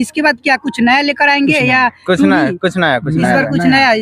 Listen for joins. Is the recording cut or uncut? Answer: uncut